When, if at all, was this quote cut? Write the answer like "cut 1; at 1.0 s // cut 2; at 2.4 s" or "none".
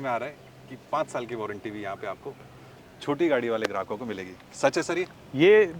none